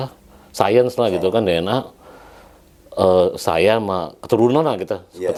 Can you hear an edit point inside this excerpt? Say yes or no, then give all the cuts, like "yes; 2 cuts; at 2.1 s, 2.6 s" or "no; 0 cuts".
no; 0 cuts